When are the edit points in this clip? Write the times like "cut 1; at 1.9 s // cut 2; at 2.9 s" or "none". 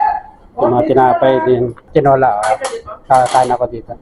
cut 1; at 1.8 s